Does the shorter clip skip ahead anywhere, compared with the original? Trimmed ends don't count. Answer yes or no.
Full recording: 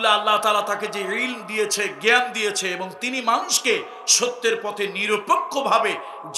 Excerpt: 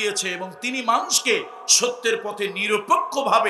no